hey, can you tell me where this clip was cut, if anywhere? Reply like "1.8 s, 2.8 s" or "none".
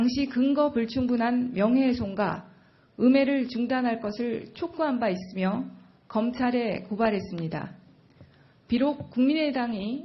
4.4 s